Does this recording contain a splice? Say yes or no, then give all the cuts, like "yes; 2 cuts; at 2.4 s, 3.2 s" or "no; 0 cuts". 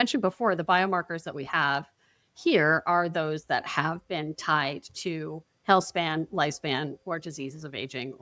no; 0 cuts